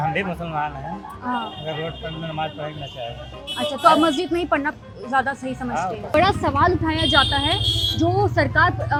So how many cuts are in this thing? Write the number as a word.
zero